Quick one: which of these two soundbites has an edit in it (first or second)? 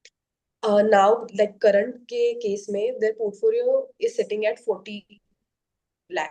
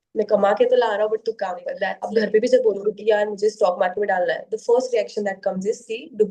second